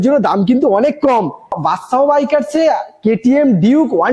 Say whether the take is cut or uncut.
cut